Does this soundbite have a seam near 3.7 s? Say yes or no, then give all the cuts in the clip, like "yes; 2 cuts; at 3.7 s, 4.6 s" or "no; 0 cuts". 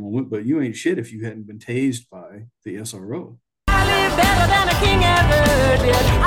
yes; 1 cut; at 3.7 s